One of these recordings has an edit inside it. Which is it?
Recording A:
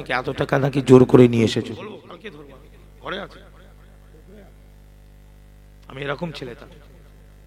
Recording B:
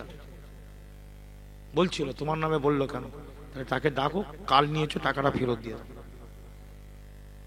A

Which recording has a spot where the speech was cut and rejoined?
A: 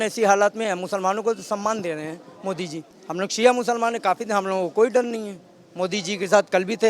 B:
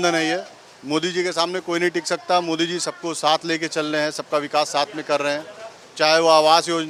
A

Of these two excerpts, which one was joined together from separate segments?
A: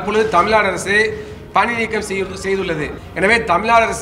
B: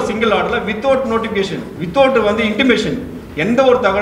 A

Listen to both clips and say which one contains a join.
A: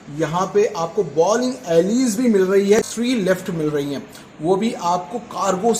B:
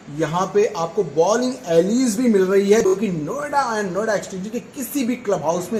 A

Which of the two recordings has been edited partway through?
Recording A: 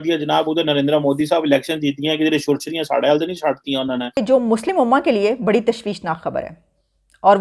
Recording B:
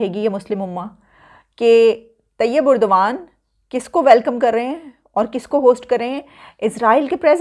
A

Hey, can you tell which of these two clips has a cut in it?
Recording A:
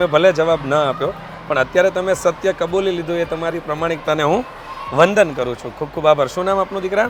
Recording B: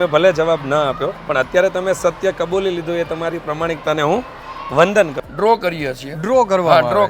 B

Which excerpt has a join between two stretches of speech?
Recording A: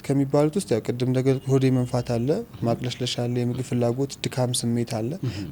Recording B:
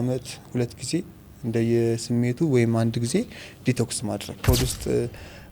B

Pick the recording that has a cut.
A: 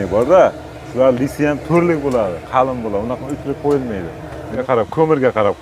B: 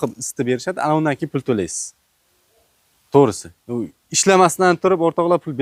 A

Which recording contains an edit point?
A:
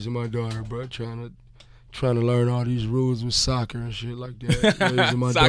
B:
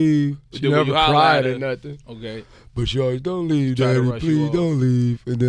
A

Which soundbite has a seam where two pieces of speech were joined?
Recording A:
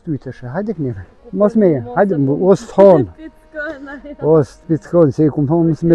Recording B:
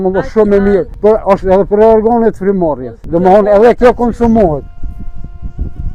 B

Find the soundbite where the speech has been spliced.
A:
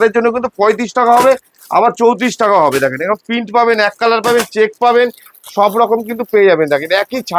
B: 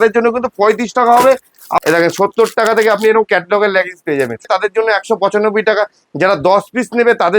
B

